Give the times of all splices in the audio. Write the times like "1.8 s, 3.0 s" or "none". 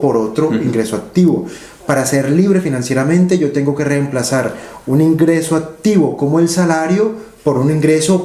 none

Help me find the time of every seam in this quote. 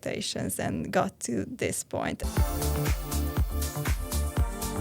2.2 s

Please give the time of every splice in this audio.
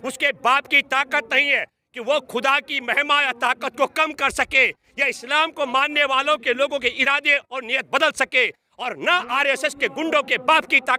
none

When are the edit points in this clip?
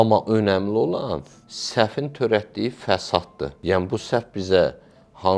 3.5 s

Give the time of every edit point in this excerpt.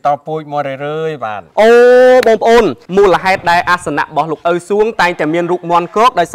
2.8 s

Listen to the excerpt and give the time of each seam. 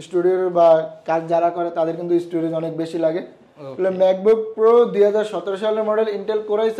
none

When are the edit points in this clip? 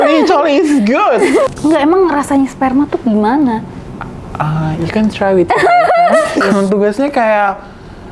1.5 s, 6.4 s

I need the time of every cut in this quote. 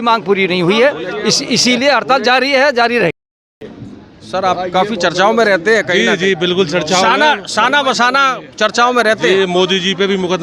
3.1 s

